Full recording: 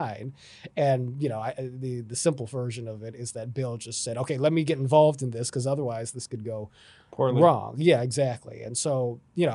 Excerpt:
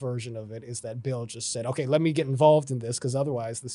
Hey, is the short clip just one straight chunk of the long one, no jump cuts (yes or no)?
yes